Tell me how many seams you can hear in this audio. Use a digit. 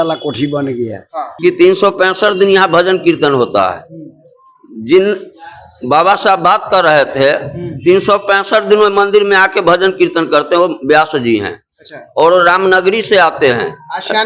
1